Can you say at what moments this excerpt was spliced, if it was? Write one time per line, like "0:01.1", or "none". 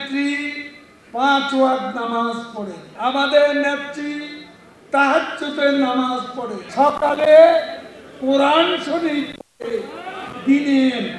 0:02.8
0:06.6

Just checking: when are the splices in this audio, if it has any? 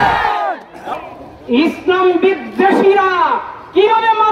0:00.9

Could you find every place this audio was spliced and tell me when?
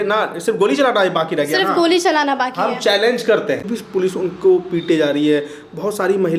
0:03.8

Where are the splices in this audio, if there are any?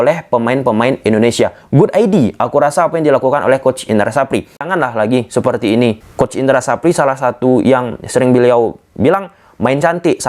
0:04.7
0:06.0

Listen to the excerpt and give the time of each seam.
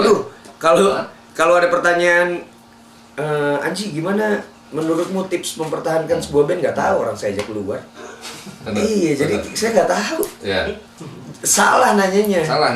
0:08.6

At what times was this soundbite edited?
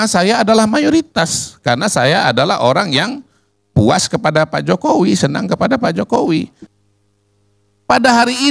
0:06.6

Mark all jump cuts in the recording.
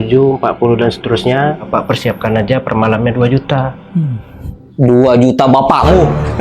none

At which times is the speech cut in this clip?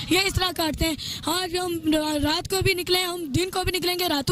none

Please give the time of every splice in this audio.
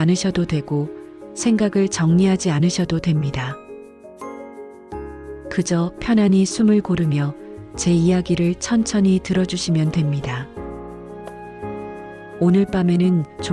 0:03.5
0:05.5

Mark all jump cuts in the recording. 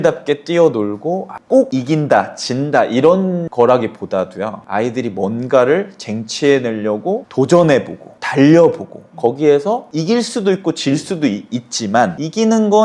0:01.3

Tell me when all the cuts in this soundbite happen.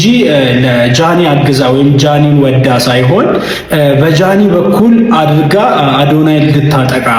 none

